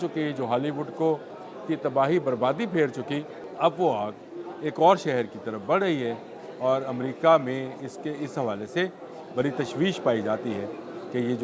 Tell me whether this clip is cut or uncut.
cut